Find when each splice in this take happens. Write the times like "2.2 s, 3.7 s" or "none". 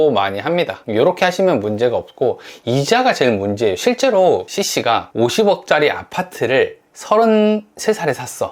4.6 s